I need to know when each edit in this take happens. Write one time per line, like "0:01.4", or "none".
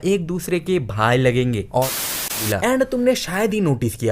0:02.4

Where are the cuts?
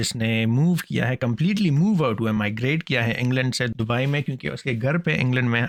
none

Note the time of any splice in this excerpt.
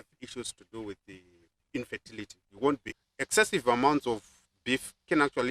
0:02.9

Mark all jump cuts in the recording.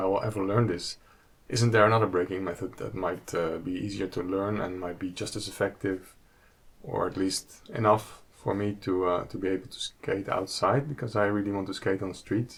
none

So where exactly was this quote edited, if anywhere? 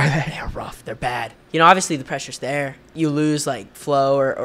0:01.4
0:02.8

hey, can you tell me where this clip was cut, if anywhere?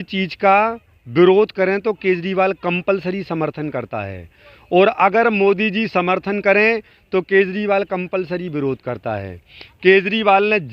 none

